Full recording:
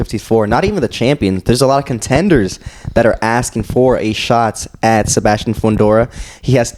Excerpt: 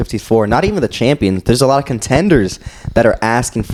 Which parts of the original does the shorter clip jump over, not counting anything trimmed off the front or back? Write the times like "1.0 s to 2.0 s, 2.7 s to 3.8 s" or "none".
none